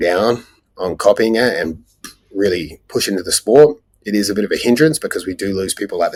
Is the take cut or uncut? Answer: uncut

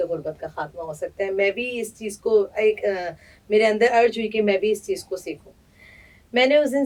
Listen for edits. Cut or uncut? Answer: uncut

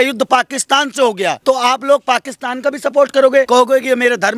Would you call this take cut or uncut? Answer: cut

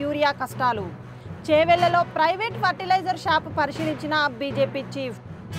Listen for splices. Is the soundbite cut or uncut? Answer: uncut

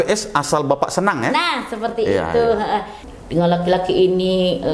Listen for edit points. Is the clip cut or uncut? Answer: cut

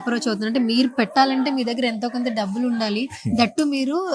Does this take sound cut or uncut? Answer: uncut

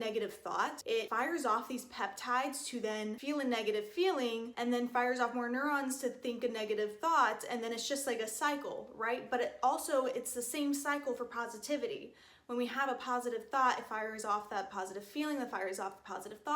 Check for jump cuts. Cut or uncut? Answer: cut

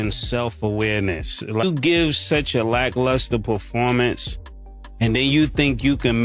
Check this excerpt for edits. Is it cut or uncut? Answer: cut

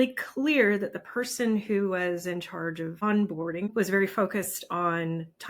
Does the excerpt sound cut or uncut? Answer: cut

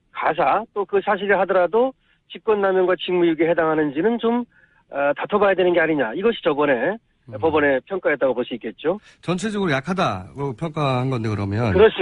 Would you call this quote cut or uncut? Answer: uncut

